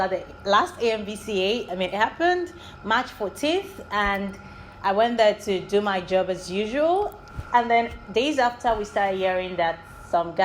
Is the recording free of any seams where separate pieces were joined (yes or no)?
yes